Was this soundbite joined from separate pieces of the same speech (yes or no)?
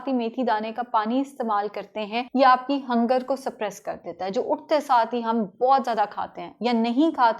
yes